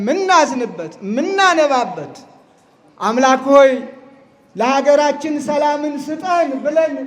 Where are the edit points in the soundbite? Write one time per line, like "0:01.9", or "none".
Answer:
none